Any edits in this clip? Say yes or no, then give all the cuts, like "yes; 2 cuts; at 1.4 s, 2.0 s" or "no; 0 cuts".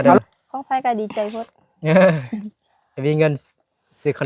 no; 0 cuts